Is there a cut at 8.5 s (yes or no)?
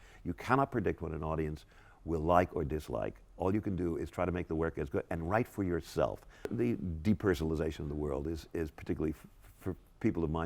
no